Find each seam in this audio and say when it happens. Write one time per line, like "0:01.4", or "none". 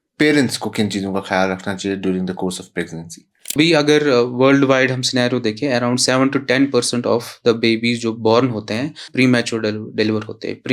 0:03.6
0:09.0